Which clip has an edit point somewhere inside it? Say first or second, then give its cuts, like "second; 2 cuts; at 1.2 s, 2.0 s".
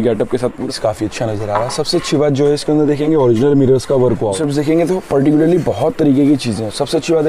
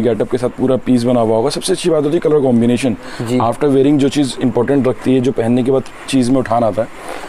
first; 2 cuts; at 0.8 s, 4.3 s